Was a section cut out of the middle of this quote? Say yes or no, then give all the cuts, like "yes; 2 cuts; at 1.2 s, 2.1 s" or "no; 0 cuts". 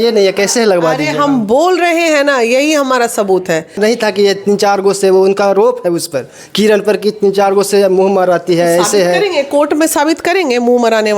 yes; 1 cut; at 3.8 s